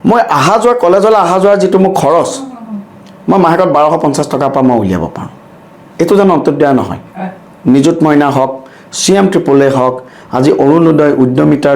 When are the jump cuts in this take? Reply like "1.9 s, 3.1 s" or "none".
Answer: none